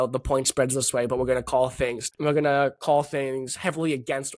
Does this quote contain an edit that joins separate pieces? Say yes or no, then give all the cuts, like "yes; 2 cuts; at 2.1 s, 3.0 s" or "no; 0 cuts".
yes; 1 cut; at 2.1 s